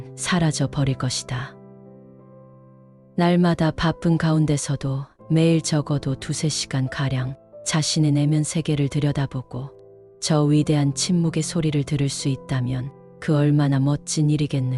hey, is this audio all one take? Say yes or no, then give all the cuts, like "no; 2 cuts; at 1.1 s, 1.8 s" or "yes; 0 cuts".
no; 2 cuts; at 1.5 s, 3.1 s